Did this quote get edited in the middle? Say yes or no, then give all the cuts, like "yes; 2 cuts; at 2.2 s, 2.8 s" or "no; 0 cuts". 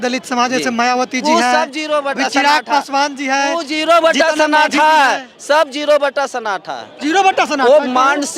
no; 0 cuts